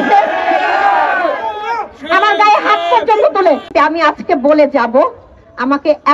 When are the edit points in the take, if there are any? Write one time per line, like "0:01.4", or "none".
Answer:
0:03.7